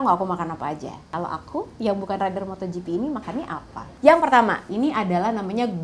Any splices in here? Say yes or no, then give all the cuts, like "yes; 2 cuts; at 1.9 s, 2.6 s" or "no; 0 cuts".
yes; 2 cuts; at 1.1 s, 3.9 s